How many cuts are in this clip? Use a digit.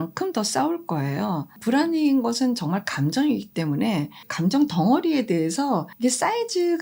1